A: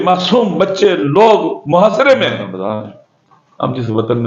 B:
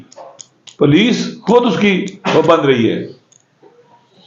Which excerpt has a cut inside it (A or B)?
A